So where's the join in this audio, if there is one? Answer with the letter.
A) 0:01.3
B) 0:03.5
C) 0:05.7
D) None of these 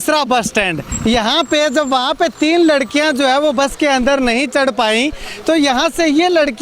D